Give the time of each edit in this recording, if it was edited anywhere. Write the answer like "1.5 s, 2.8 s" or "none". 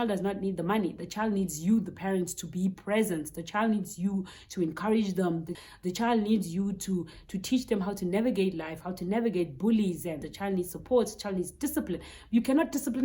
5.5 s, 10.3 s